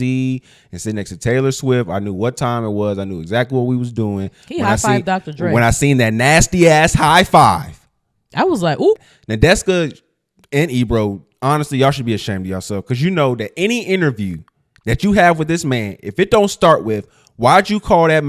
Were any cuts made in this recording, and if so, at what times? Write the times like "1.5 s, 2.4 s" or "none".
9.1 s